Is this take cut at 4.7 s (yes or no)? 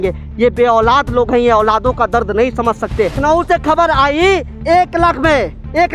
no